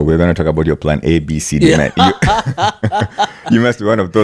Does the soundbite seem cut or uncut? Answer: uncut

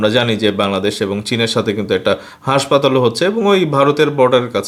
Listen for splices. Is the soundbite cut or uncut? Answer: uncut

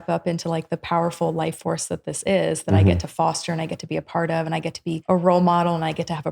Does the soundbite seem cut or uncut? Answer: cut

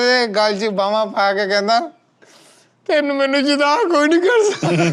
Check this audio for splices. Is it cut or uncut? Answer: uncut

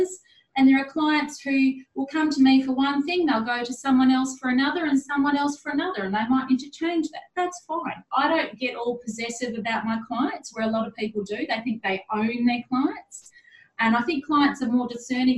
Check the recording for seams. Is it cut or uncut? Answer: uncut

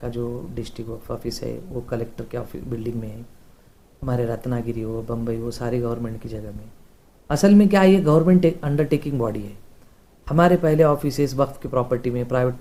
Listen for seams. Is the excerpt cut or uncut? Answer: uncut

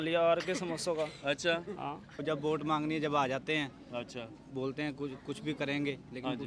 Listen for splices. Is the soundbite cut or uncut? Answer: cut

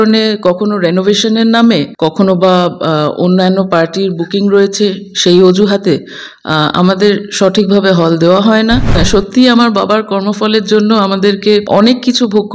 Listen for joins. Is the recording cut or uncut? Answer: cut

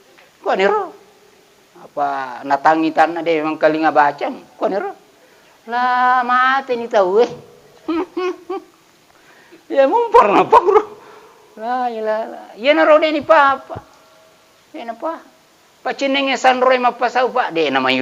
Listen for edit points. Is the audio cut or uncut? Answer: uncut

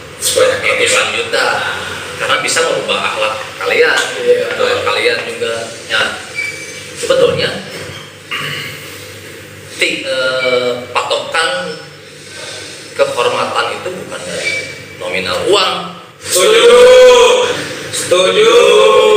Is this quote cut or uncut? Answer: cut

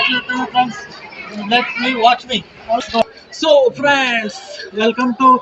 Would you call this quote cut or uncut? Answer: cut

